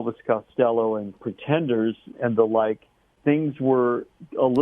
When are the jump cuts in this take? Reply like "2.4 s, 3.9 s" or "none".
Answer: 2.1 s, 3.1 s